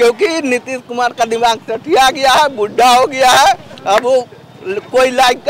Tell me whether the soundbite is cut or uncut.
uncut